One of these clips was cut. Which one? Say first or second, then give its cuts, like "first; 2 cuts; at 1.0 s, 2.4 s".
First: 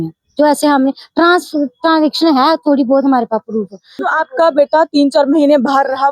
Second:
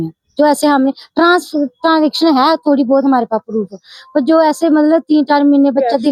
first; 1 cut; at 4.1 s